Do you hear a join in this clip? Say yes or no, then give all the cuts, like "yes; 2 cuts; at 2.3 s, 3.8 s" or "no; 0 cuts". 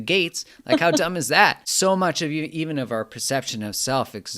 yes; 1 cut; at 1.6 s